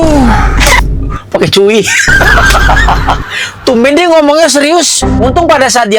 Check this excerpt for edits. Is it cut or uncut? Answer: uncut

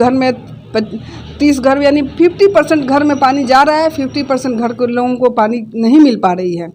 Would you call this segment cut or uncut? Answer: uncut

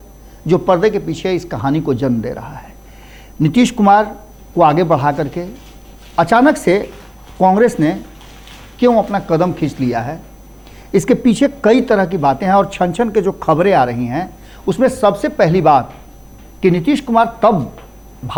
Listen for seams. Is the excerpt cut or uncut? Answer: uncut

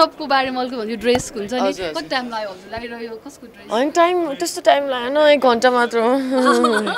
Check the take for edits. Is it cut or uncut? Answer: uncut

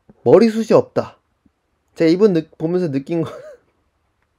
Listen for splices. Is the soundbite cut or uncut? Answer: uncut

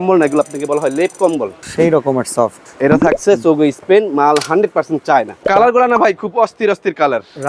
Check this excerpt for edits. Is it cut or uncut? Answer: cut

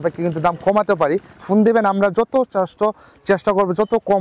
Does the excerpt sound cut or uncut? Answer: cut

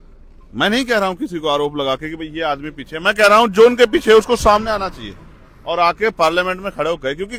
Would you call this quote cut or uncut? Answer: uncut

